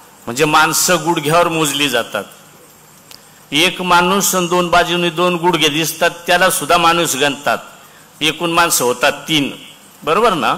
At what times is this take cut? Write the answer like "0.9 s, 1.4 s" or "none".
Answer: none